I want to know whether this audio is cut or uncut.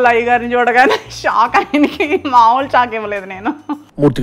uncut